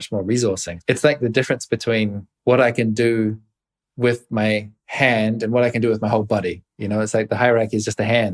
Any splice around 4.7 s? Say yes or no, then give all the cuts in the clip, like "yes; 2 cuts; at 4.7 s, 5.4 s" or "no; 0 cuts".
no; 1 cut; at 2.2 s